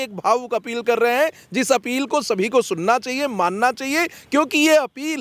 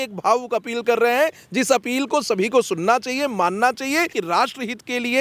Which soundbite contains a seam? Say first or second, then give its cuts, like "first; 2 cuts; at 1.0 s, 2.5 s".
second; 1 cut; at 4.2 s